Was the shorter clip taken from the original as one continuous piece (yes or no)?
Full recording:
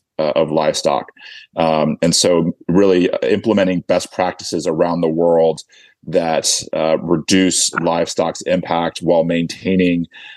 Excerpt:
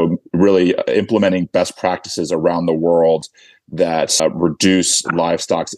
no